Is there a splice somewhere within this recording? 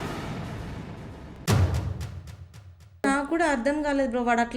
yes; 1 cut; at 3.0 s

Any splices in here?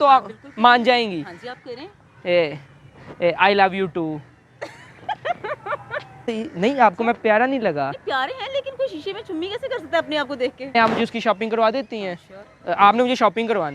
yes; 2 cuts; at 6.2 s, 10.7 s

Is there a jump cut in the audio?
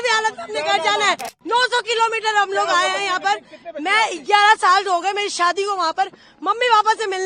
yes; 1 cut; at 1.3 s

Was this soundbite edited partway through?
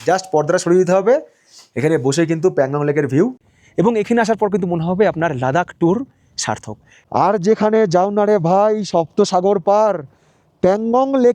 yes; 2 cuts; at 3.4 s, 6.9 s

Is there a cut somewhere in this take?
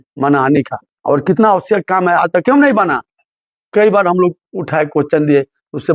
no; 0 cuts

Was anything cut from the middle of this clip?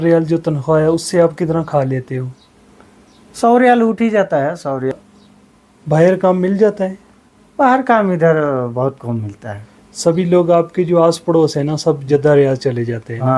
yes; 1 cut; at 4.9 s

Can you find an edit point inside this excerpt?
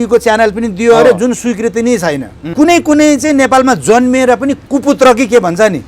yes; 2 cuts; at 2.5 s, 4.6 s

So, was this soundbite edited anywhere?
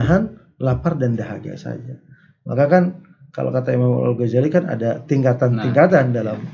no; 0 cuts

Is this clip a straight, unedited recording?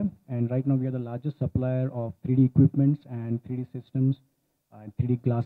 yes; 0 cuts

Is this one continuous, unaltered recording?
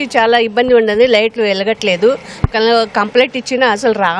yes; 0 cuts

